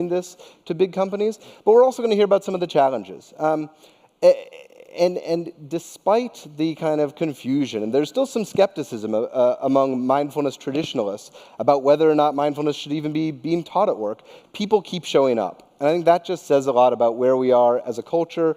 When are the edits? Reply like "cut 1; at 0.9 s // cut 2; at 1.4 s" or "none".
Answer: none